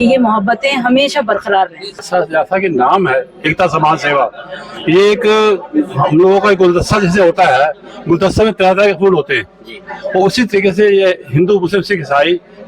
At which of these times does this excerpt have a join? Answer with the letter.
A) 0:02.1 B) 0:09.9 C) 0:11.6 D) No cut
A